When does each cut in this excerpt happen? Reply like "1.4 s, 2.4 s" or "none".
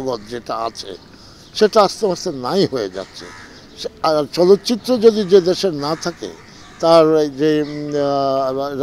none